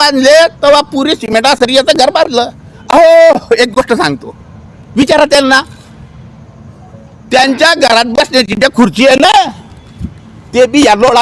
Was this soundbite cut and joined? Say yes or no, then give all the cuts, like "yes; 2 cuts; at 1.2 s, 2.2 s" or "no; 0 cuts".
no; 0 cuts